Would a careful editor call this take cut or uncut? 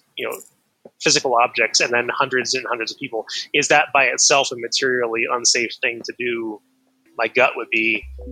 cut